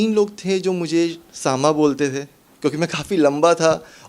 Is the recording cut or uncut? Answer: uncut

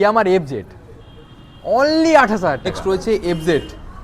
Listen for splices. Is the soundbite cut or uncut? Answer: cut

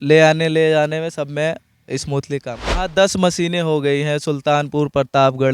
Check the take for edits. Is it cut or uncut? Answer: cut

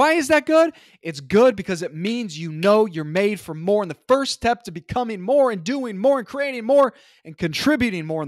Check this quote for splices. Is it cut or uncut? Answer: uncut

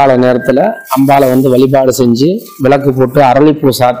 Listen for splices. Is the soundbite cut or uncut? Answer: uncut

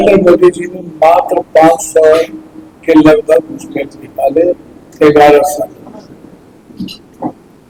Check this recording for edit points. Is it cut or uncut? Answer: uncut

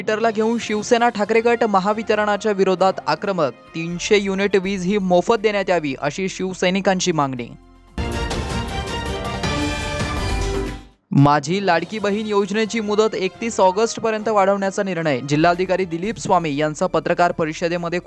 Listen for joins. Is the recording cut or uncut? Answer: uncut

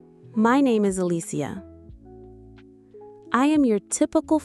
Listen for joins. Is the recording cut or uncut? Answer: cut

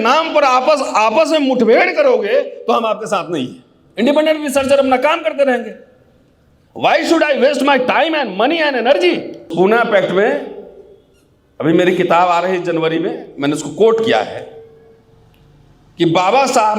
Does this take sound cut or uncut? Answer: cut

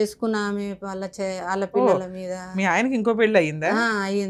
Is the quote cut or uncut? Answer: uncut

